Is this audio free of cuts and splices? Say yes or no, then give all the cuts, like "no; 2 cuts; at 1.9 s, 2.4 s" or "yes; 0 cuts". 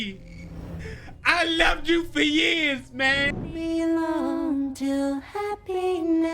no; 1 cut; at 3.5 s